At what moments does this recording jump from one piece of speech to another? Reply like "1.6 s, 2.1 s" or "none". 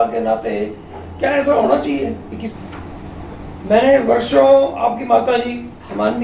2.4 s